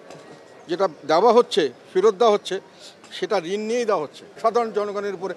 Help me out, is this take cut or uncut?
uncut